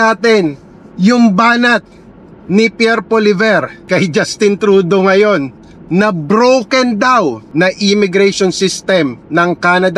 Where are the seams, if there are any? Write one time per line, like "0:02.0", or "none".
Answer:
0:03.8
0:07.4